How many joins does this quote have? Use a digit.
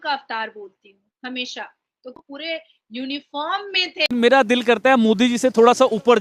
1